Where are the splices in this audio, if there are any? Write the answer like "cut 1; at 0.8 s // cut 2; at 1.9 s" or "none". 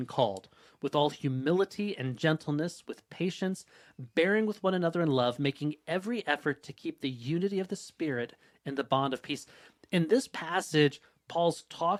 none